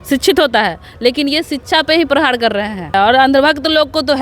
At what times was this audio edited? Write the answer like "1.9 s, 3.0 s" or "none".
2.9 s